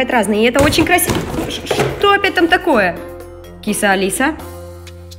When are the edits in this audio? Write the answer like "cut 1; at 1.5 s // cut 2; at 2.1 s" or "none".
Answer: none

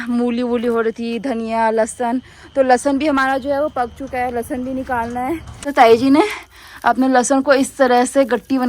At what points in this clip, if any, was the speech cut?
cut 1; at 5.6 s

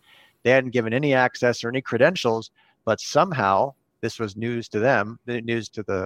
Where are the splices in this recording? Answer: none

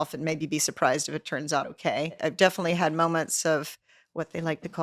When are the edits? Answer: cut 1; at 2.2 s

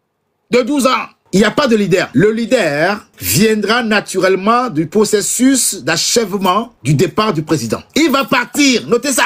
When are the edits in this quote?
cut 1; at 1.1 s // cut 2; at 2.1 s // cut 3; at 3.1 s // cut 4; at 6.7 s // cut 5; at 7.9 s

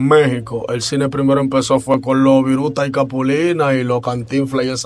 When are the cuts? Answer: none

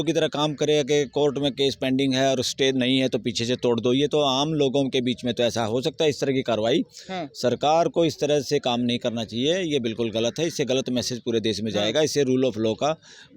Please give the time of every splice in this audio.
none

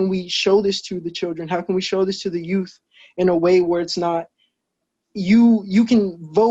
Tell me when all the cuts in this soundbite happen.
none

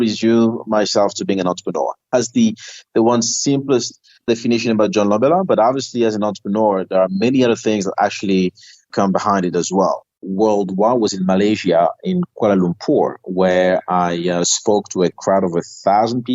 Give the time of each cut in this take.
cut 1; at 2.1 s // cut 2; at 10.1 s

